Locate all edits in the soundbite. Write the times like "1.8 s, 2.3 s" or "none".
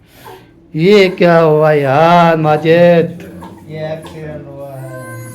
3.5 s